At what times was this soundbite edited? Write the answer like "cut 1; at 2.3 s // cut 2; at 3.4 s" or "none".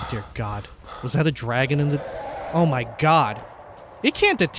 cut 1; at 2.4 s